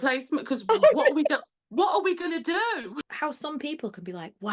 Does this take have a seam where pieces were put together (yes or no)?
yes